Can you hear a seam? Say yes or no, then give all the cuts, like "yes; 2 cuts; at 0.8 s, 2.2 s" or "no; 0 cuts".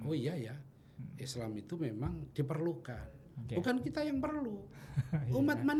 no; 0 cuts